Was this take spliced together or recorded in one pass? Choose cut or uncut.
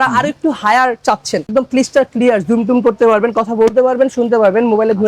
cut